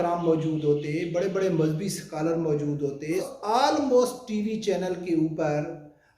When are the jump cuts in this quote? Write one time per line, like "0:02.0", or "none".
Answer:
0:03.3